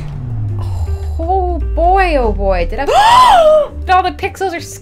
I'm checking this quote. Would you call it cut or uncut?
cut